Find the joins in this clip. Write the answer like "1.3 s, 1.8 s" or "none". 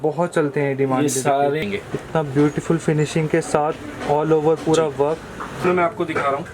1.6 s, 5.6 s